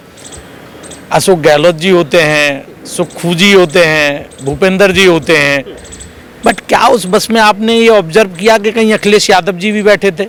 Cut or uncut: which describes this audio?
uncut